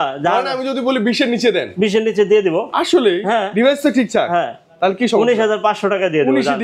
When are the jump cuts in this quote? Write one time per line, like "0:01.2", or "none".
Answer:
none